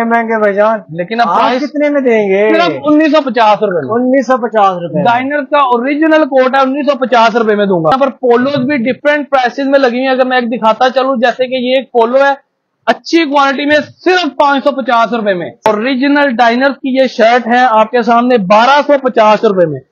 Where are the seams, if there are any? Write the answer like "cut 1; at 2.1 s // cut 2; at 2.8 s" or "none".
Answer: cut 1; at 7.9 s // cut 2; at 15.7 s